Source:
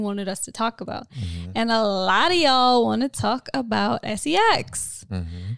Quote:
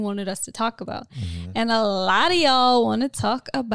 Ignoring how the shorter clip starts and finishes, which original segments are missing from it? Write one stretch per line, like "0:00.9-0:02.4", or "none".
none